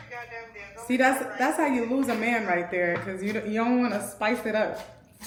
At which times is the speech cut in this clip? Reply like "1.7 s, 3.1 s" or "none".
none